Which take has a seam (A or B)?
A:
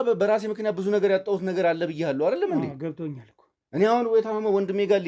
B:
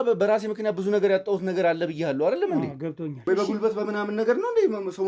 B